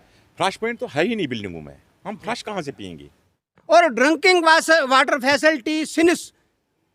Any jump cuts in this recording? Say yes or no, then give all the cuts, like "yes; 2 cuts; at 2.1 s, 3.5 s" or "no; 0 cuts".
yes; 1 cut; at 3.5 s